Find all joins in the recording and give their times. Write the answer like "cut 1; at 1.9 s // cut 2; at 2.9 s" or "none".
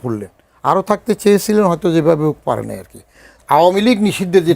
cut 1; at 3.3 s